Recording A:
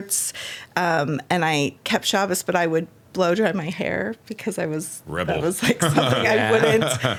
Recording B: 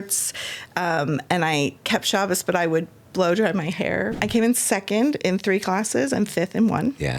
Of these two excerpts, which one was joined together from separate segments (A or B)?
B